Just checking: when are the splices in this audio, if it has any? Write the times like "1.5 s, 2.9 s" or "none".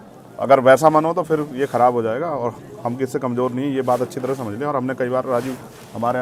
none